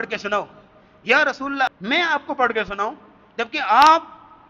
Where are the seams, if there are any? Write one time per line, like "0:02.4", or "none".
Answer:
0:01.7

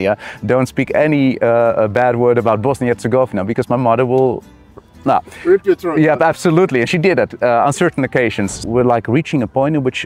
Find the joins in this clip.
0:08.6

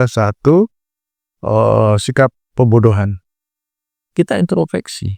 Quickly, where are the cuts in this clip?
0:04.0

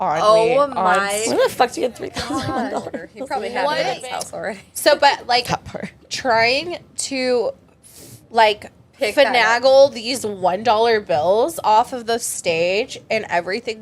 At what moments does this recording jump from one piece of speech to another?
0:04.0

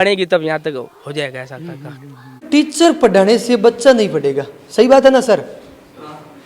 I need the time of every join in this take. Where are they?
0:02.4

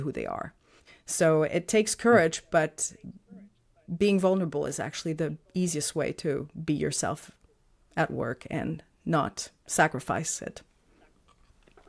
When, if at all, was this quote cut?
none

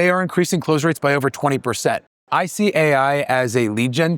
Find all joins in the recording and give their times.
0:02.1

